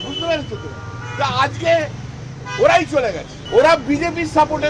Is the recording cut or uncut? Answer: cut